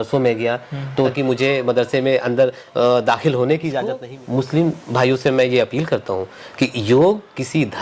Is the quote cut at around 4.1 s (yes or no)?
yes